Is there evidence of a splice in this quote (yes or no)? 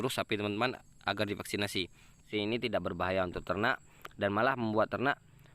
yes